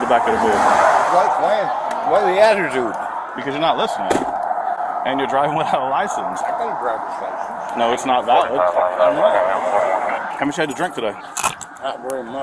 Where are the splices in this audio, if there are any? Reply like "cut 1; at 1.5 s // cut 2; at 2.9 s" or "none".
none